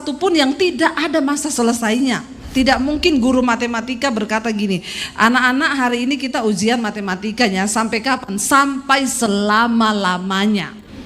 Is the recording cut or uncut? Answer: cut